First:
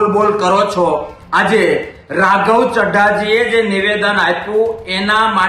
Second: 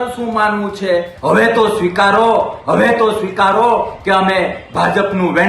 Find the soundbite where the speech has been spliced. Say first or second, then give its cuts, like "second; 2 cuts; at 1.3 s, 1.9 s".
second; 1 cut; at 1.1 s